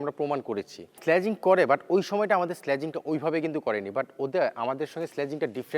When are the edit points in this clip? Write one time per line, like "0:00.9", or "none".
0:00.9